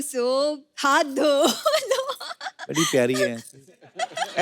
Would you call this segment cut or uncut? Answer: uncut